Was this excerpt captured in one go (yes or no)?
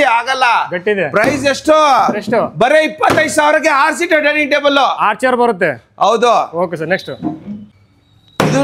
yes